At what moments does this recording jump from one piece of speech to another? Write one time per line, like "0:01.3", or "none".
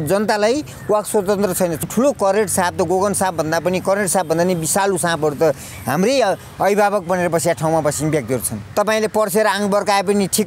0:01.9
0:08.6